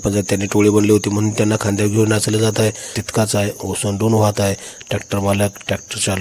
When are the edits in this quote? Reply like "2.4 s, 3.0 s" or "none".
2.9 s